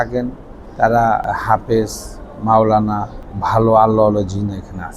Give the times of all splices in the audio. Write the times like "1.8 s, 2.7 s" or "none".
1.2 s, 3.1 s